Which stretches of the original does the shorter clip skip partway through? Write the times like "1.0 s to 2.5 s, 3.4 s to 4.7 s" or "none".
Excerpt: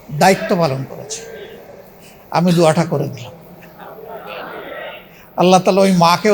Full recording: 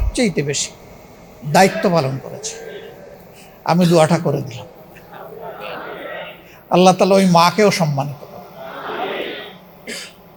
none